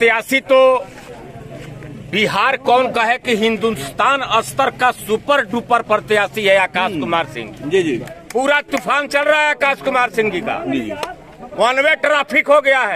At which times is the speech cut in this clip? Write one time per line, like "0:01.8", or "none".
0:08.2